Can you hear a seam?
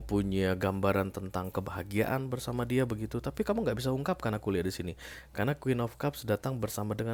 no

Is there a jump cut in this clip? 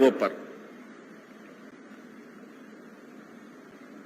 no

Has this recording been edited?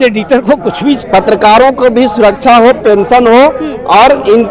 yes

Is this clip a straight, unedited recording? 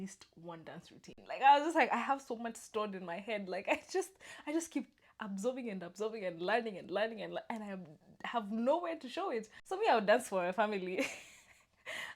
no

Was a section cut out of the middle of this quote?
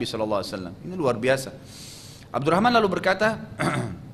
no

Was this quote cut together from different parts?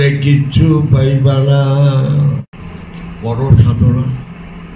yes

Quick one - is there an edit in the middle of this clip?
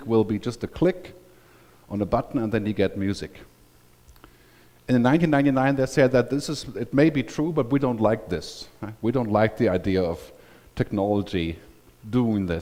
no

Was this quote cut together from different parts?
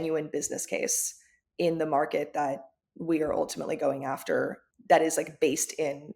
yes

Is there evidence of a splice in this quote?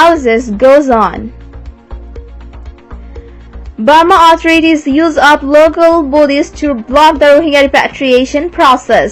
yes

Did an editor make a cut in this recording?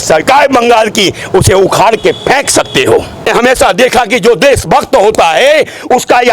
yes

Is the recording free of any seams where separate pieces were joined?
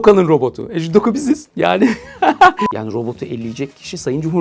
no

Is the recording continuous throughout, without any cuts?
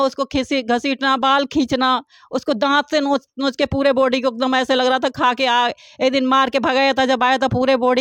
yes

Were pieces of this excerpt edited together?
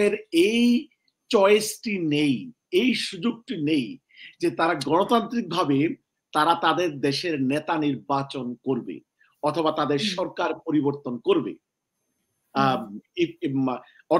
no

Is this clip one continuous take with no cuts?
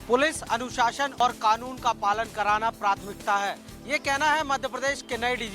no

